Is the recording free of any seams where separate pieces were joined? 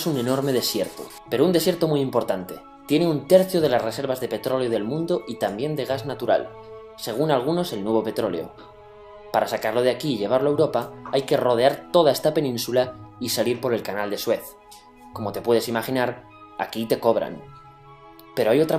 no; 1 cut; at 10.5 s

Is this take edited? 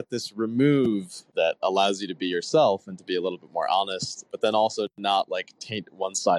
yes; 2 cuts; at 1.3 s, 4.3 s

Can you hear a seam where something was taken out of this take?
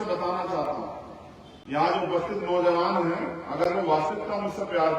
no; 0 cuts

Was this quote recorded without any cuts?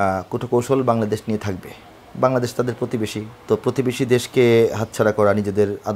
no; 1 cut; at 3.3 s

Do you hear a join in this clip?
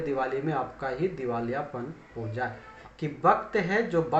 yes; 1 cut; at 2.8 s

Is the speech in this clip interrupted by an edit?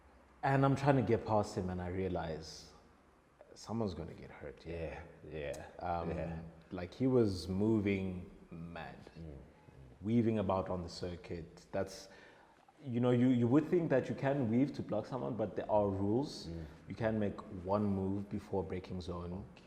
no; 0 cuts

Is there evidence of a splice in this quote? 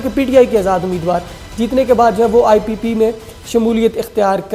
no; 0 cuts

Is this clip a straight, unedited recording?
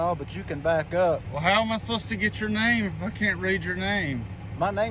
no; 1 cut; at 1.3 s

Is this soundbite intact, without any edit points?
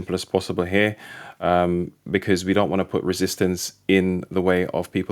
yes; 0 cuts

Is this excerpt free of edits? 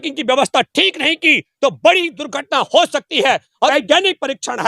no; 1 cut; at 3.7 s

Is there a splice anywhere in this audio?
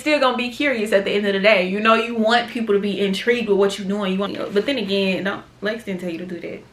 yes; 1 cut; at 4.3 s

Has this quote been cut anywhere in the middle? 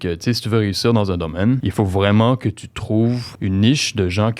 yes; 2 cuts; at 1.7 s, 3.3 s

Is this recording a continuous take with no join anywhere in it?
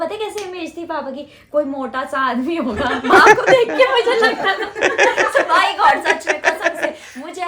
yes; 0 cuts

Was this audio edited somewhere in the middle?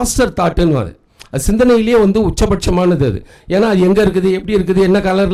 no; 0 cuts

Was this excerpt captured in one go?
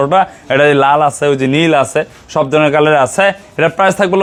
yes; 0 cuts

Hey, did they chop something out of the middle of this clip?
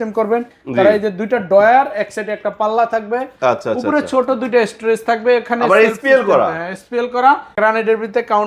yes; 1 cut; at 7.5 s

